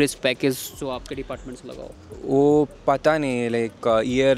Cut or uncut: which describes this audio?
uncut